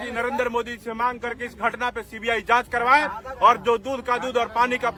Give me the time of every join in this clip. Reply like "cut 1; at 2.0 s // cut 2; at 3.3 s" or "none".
none